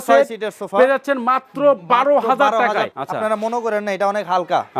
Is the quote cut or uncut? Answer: cut